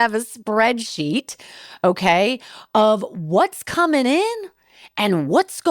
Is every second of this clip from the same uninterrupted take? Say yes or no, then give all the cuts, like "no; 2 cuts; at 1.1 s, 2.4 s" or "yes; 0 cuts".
yes; 0 cuts